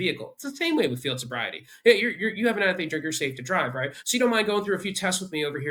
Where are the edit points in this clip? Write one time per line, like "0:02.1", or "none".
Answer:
none